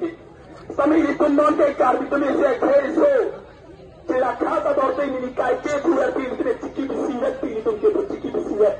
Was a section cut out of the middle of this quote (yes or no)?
no